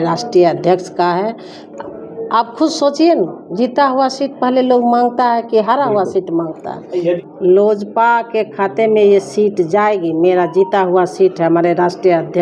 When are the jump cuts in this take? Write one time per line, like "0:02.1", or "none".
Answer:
0:06.9